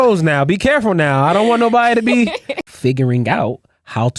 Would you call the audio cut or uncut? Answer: cut